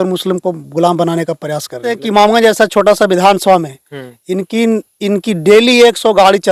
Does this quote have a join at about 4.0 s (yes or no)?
no